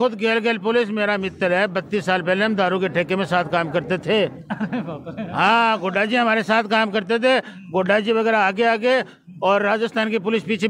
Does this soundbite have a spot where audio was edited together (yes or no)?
no